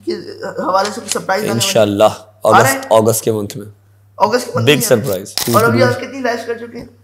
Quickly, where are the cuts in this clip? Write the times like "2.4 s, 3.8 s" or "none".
5.4 s